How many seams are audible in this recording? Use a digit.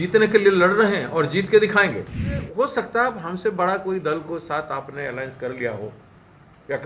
1